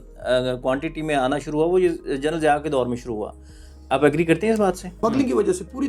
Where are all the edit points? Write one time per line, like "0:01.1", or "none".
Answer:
0:04.9